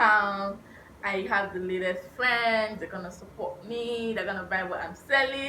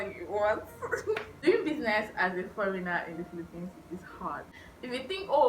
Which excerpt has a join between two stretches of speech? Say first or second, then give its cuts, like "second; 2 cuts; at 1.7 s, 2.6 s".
second; 2 cuts; at 1.3 s, 4.3 s